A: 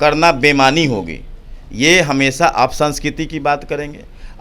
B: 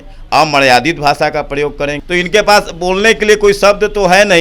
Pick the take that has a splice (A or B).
B